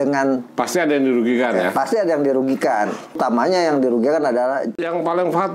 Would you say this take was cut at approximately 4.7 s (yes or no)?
yes